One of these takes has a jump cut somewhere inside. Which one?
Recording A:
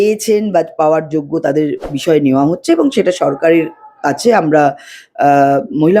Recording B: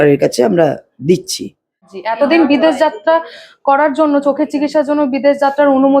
B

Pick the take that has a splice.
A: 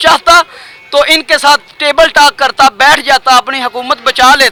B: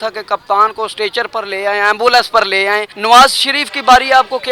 B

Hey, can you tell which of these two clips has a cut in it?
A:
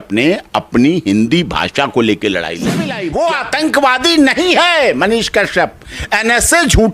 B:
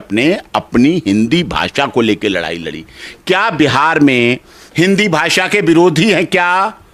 A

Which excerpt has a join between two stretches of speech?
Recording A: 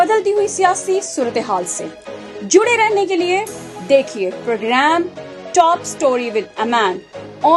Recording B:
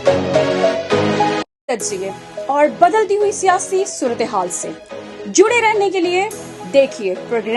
B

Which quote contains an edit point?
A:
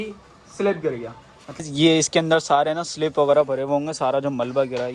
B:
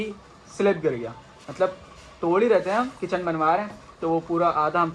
A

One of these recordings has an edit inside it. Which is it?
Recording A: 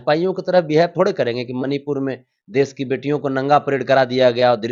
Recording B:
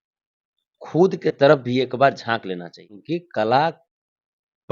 B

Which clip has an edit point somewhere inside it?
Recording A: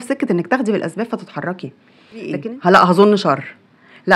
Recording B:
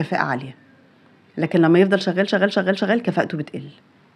A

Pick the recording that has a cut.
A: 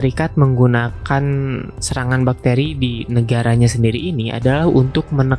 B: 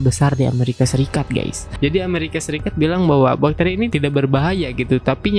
B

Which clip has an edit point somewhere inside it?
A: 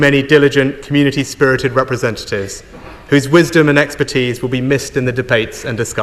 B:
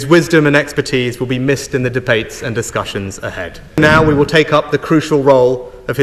B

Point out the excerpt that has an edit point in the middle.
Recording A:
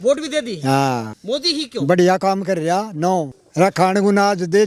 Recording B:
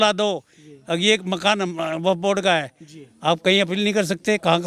A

